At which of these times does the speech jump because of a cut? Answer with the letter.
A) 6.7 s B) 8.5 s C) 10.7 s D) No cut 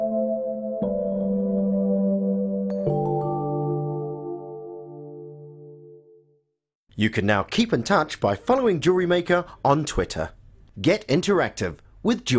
A